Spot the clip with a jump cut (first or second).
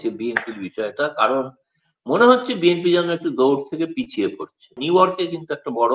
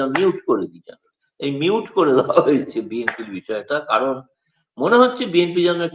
first